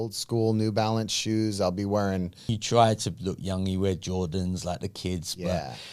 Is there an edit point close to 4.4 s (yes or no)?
no